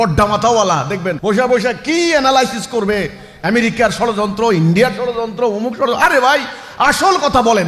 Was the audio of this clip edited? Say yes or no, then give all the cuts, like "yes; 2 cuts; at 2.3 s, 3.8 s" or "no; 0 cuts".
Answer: yes; 1 cut; at 1.1 s